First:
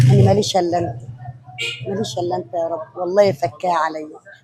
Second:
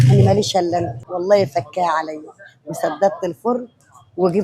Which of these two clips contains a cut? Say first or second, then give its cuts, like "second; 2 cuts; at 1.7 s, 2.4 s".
second; 1 cut; at 1.0 s